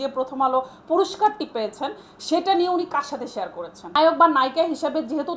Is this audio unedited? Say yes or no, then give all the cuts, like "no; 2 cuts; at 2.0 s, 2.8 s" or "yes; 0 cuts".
no; 1 cut; at 4.0 s